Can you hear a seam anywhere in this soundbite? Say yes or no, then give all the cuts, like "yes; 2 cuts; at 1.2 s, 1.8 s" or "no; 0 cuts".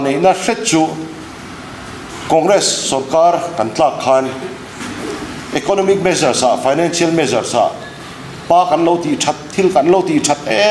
no; 0 cuts